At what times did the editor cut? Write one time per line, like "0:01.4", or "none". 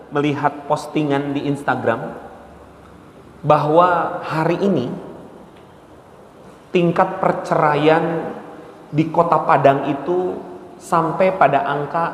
none

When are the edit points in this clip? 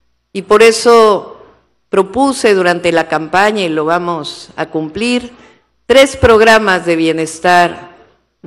none

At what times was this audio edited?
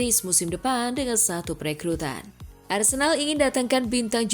0:02.2

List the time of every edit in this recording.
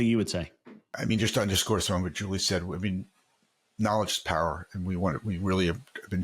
0:01.0

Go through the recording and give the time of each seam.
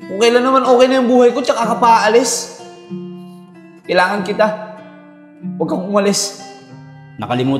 0:02.5
0:03.8

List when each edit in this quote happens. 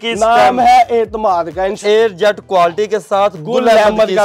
0:01.7

